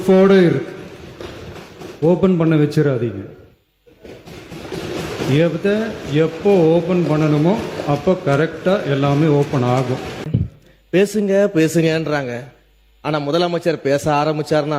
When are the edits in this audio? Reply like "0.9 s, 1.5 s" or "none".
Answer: 10.3 s